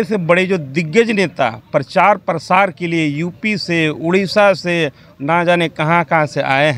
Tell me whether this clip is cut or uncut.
uncut